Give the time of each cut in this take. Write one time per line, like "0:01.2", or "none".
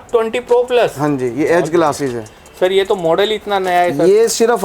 none